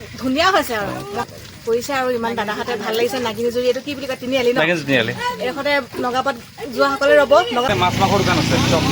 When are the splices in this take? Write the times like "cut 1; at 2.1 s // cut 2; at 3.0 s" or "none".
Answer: cut 1; at 1.2 s // cut 2; at 7.7 s